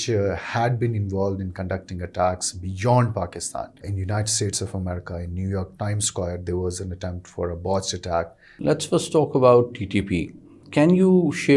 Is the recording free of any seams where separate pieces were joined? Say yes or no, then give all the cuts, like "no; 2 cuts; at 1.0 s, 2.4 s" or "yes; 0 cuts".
no; 3 cuts; at 3.9 s, 8.4 s, 10.6 s